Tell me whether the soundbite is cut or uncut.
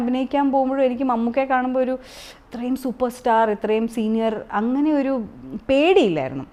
uncut